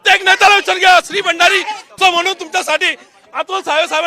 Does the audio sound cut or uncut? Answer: cut